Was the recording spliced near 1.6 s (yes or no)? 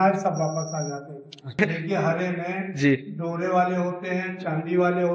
yes